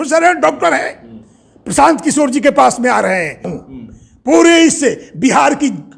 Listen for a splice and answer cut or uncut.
cut